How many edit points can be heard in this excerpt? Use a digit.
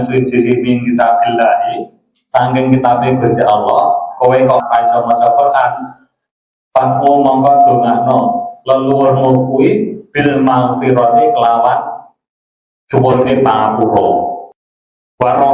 2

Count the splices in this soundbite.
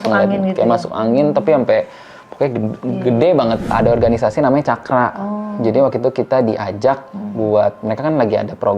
1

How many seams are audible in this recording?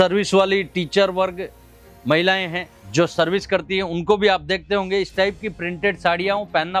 0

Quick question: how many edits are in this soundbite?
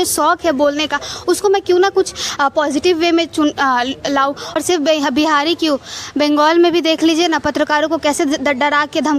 1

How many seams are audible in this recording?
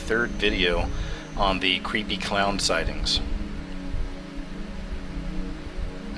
1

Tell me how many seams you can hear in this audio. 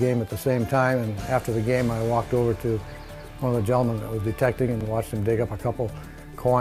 1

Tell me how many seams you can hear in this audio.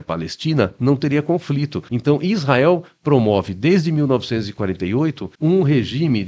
2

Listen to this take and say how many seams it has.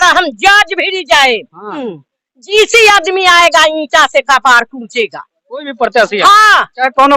1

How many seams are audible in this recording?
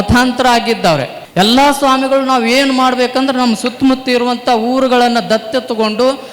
1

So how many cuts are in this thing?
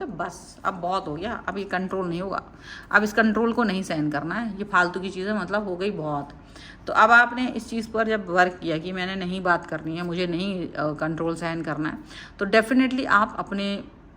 0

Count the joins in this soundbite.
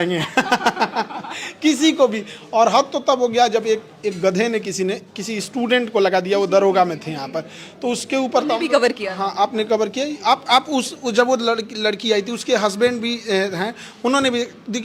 0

